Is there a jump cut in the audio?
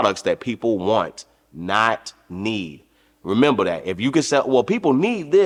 no; 0 cuts

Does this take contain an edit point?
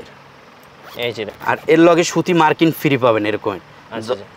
yes; 1 cut; at 1.3 s

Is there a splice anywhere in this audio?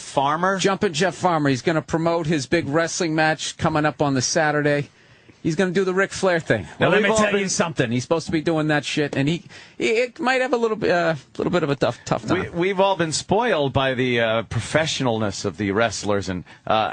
yes; 1 cut; at 16.0 s

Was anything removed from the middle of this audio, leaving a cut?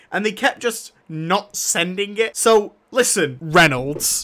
yes; 2 cuts; at 2.3 s, 3.4 s

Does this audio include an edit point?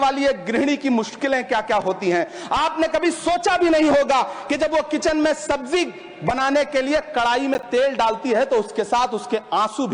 no; 0 cuts

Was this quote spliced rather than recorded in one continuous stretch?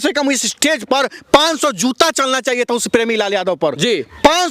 no; 0 cuts

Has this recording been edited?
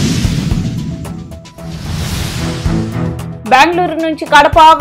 yes; 1 cut; at 3.3 s

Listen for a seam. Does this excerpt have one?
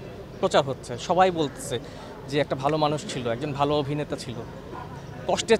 no; 0 cuts

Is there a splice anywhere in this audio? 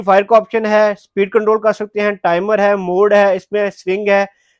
no; 0 cuts

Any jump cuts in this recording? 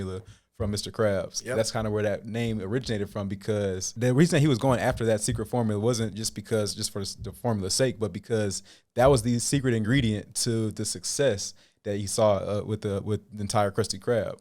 yes; 1 cut; at 3.9 s

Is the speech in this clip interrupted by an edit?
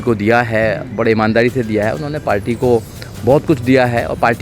no; 0 cuts

